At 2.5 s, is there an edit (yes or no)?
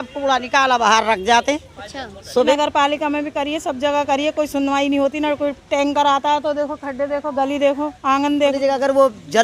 yes